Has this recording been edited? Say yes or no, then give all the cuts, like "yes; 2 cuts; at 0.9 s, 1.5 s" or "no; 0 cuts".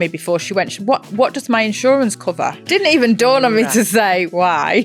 yes; 2 cuts; at 2.6 s, 3.7 s